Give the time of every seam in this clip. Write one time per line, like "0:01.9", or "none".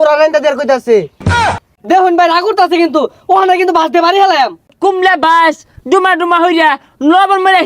0:01.4
0:04.7